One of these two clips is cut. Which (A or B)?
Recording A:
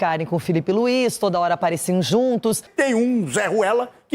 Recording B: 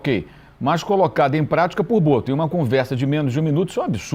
A